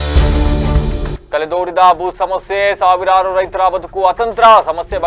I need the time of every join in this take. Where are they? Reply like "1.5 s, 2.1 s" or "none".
none

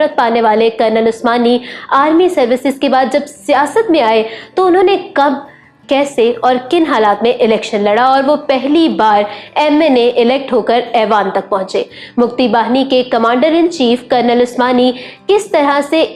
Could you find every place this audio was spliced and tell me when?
none

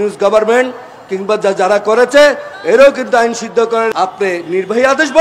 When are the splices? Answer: 3.9 s

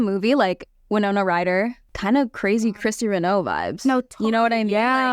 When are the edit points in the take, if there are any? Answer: 1.9 s

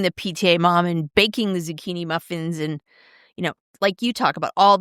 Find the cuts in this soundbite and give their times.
none

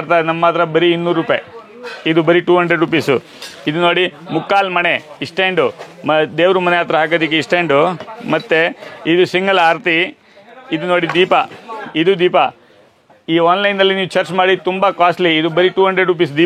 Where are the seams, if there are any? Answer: none

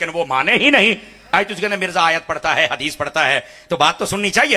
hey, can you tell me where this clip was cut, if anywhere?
1.3 s

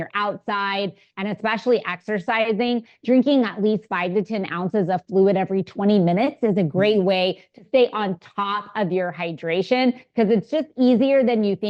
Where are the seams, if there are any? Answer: none

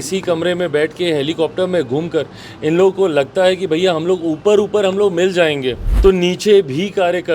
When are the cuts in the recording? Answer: 5.8 s

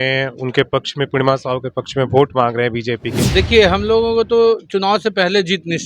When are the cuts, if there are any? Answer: 3.2 s

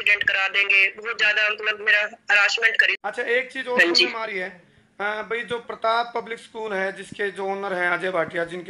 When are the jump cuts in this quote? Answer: 2.9 s

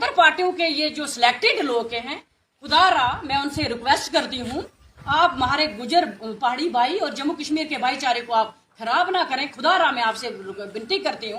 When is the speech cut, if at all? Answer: none

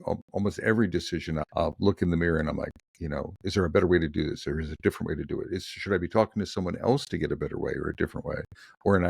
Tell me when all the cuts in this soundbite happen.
1.4 s

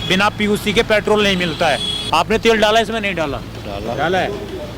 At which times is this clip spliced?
1.9 s, 3.6 s

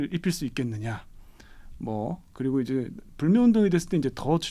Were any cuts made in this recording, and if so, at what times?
none

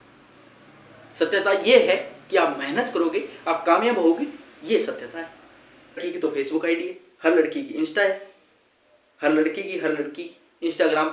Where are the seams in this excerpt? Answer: 6.0 s

